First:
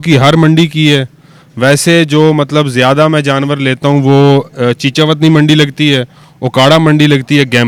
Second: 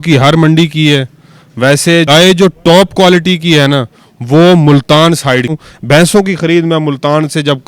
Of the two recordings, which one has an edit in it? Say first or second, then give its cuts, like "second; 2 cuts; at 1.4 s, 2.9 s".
second; 2 cuts; at 2.1 s, 5.6 s